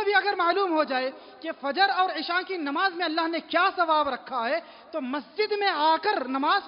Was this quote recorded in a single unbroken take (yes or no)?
yes